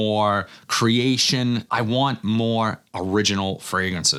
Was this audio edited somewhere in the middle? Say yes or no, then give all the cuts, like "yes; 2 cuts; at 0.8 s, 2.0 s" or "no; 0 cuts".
no; 0 cuts